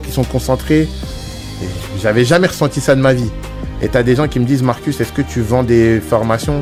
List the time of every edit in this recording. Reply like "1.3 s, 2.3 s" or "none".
none